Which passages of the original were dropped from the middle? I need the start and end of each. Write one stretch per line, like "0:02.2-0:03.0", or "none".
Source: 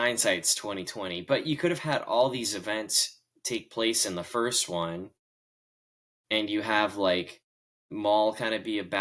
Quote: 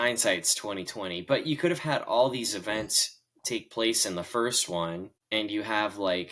0:05.1-0:06.1